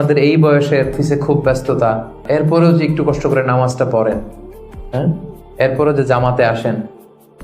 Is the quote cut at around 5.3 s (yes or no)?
no